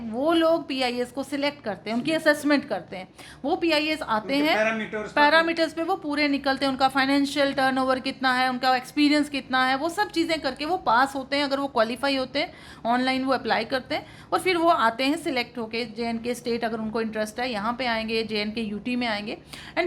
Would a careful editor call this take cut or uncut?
uncut